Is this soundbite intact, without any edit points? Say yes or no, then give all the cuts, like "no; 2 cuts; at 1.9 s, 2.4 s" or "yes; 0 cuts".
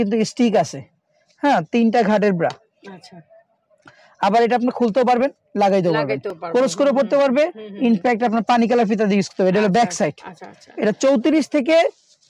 yes; 0 cuts